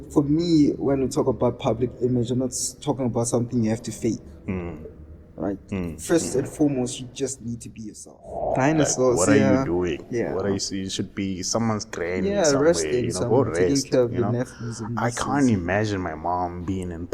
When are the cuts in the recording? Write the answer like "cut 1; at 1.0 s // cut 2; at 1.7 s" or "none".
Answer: cut 1; at 8.4 s